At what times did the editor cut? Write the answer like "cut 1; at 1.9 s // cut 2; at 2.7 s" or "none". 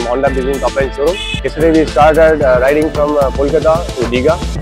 cut 1; at 1.5 s